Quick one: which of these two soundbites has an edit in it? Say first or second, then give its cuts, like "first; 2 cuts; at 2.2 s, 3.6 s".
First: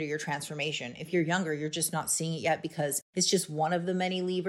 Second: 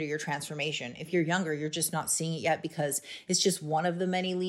first; 1 cut; at 3.0 s